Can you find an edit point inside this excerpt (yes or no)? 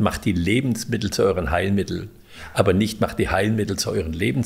no